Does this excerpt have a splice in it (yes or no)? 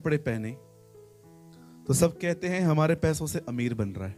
no